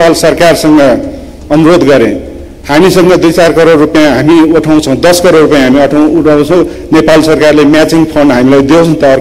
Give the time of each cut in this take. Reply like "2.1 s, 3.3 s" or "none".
none